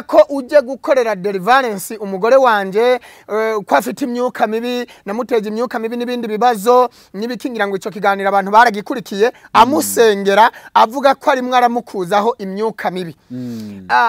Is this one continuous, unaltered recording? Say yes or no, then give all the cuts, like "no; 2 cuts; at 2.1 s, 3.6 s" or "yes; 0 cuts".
yes; 0 cuts